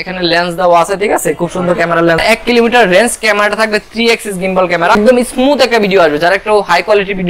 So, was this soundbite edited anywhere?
yes; 2 cuts; at 2.2 s, 5.0 s

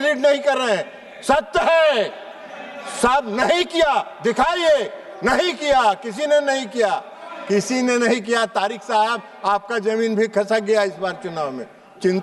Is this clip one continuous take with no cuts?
yes; 0 cuts

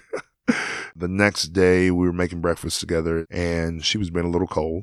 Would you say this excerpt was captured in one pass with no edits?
no; 2 cuts; at 0.9 s, 3.3 s

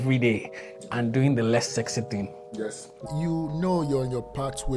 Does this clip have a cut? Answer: yes; 1 cut; at 3.0 s

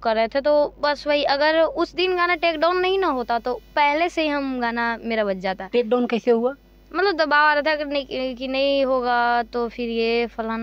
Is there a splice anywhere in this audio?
no; 0 cuts

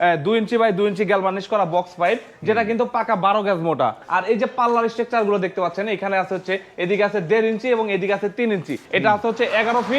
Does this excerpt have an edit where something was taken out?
yes; 2 cuts; at 4.0 s, 8.9 s

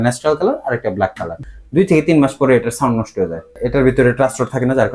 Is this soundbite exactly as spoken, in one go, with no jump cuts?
no; 2 cuts; at 1.4 s, 3.6 s

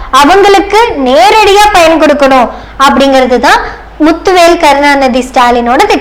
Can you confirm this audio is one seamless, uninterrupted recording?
yes; 0 cuts

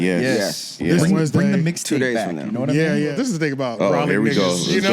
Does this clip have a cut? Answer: yes; 1 cut; at 3.1 s

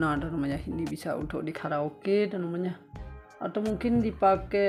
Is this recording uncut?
yes; 0 cuts

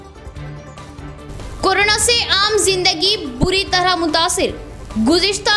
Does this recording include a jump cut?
yes; 1 cut; at 1.1 s

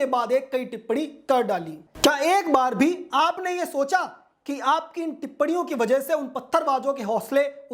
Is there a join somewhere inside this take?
yes; 1 cut; at 1.8 s

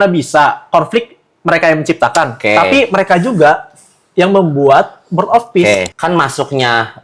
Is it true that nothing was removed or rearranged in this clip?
no; 1 cut; at 5.9 s

